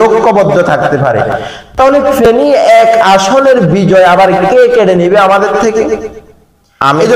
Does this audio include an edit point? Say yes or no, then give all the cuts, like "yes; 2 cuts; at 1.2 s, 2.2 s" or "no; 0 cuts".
no; 0 cuts